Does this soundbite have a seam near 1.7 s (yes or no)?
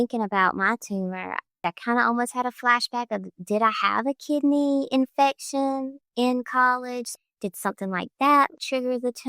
yes